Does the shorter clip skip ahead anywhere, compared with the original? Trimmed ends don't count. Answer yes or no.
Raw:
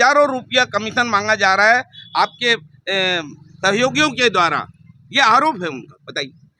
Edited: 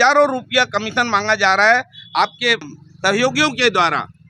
yes